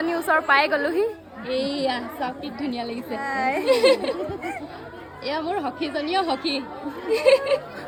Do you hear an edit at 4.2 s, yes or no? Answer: no